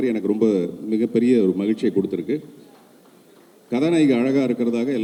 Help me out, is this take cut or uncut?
uncut